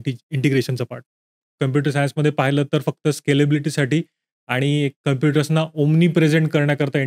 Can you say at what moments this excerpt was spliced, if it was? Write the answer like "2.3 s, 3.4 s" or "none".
1.4 s